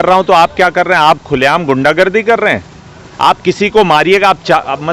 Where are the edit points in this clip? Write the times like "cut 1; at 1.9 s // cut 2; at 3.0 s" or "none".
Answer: none